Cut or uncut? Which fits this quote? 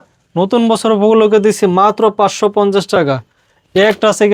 uncut